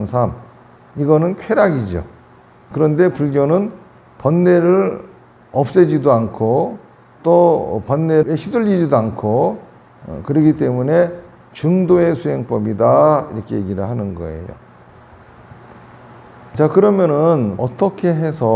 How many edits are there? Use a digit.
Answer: 2